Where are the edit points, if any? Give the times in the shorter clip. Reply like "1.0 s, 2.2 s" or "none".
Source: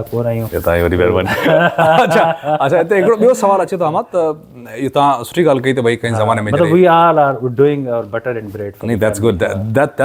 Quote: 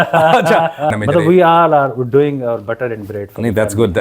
0.9 s